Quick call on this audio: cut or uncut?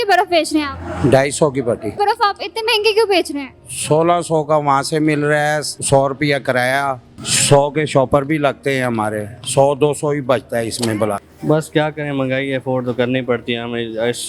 cut